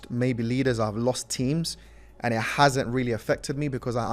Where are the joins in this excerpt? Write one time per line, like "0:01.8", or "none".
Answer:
none